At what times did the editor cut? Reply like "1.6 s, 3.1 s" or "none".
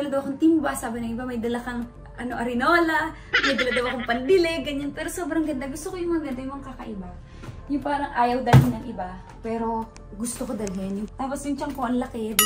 none